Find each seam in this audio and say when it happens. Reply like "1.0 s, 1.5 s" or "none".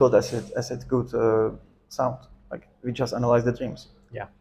none